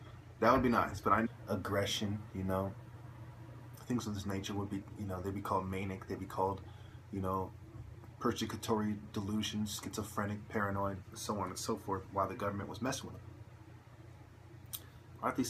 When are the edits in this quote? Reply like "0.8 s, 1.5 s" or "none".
none